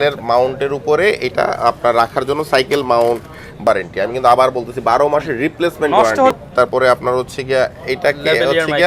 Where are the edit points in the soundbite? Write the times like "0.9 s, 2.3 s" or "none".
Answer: 3.7 s, 6.4 s